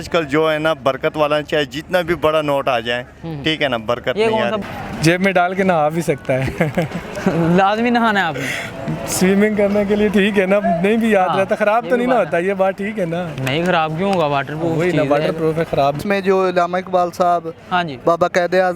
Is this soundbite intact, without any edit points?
no; 2 cuts; at 4.6 s, 16.0 s

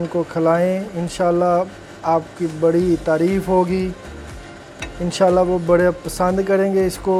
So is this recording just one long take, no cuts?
yes; 0 cuts

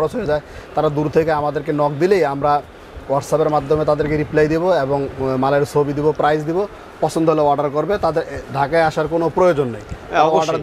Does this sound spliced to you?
no; 0 cuts

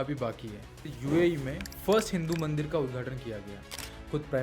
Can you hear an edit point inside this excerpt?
yes; 1 cut; at 1.0 s

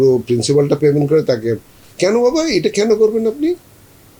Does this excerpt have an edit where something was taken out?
no; 0 cuts

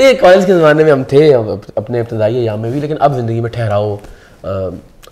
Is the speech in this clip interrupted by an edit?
no; 0 cuts

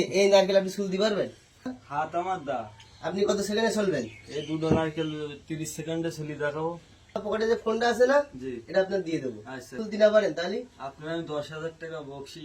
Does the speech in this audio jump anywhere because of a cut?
yes; 3 cuts; at 1.8 s, 7.2 s, 9.8 s

